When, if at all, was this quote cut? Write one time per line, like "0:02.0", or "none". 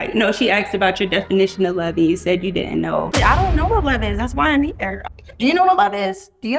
0:03.1
0:04.9